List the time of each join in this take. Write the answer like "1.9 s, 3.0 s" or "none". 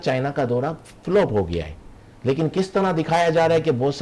none